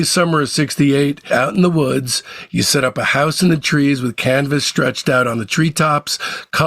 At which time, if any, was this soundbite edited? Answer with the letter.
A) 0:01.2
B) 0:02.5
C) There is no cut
A